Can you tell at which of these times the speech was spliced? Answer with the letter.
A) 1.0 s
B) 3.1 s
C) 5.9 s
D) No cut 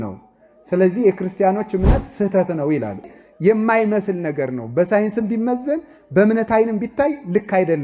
B